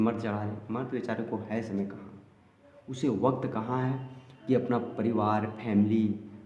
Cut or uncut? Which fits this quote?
uncut